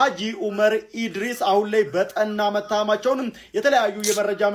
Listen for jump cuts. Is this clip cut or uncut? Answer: uncut